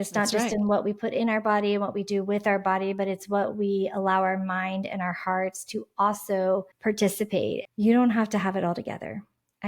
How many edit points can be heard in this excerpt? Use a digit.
1